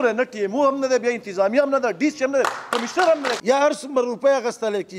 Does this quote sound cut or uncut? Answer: cut